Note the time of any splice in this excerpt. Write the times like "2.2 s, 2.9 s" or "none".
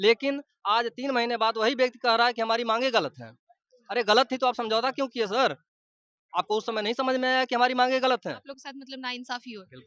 none

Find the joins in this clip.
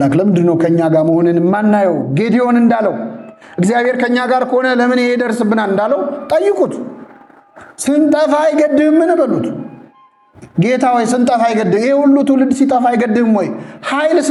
none

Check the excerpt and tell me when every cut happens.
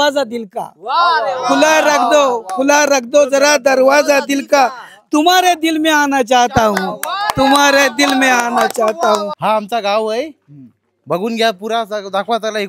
9.3 s

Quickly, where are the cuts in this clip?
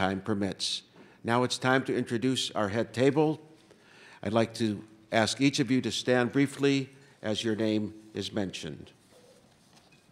3.7 s

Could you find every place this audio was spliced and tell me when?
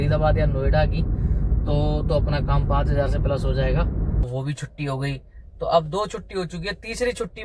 4.2 s

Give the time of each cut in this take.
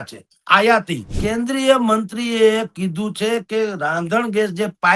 1.1 s

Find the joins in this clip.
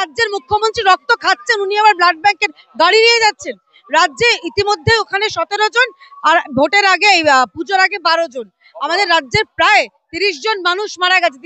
none

